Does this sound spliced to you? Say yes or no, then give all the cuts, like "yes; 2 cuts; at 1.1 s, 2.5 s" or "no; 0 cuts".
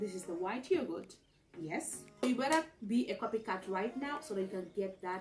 yes; 1 cut; at 2.2 s